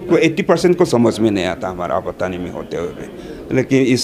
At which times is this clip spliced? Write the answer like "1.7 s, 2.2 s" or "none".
none